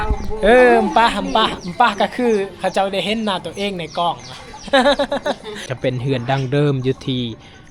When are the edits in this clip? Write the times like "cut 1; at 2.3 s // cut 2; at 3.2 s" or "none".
cut 1; at 5.7 s